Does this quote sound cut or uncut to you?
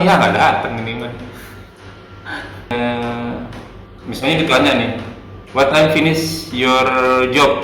cut